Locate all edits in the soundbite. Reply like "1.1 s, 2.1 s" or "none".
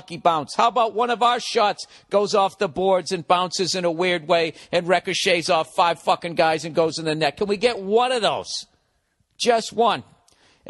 7.6 s